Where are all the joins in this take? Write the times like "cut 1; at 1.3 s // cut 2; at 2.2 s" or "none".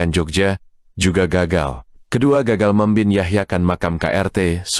cut 1; at 2.0 s